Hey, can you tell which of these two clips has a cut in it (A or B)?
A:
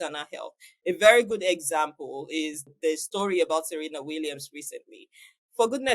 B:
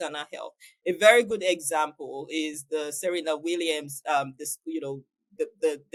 A